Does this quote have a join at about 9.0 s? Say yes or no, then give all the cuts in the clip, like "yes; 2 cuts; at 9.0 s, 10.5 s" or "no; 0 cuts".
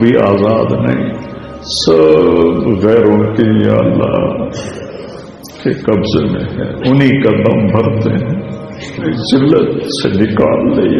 yes; 1 cut; at 9.0 s